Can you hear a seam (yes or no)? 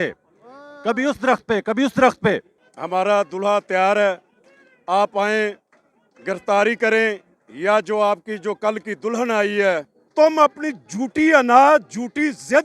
yes